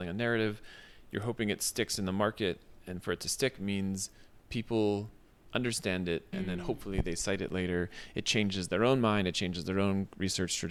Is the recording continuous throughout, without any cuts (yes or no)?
yes